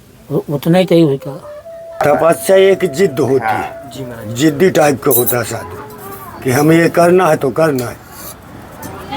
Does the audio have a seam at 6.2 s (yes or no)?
no